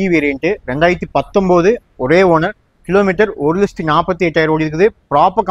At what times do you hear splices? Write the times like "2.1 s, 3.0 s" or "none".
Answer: none